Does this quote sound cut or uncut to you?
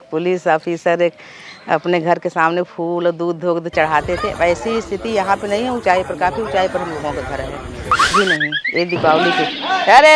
cut